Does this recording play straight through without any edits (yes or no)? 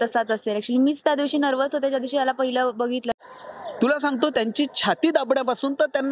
no